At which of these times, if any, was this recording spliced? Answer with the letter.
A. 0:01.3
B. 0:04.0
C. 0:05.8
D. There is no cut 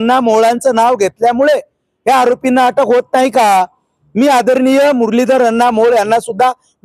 D